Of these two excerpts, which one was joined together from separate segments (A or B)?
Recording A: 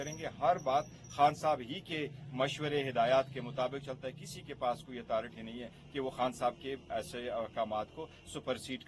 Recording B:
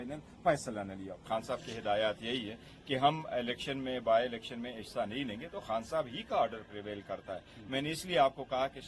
B